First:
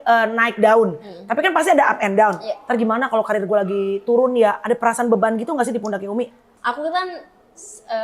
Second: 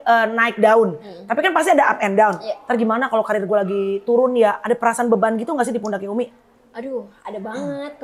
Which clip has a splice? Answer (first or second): first